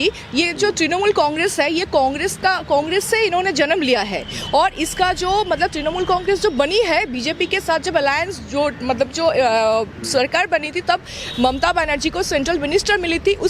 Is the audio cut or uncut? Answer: uncut